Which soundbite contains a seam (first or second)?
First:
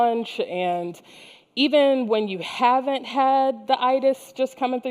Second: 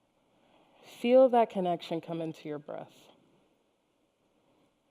second